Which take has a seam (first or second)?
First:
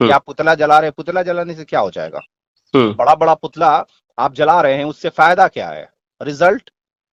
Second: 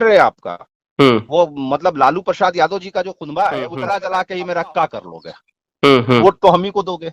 second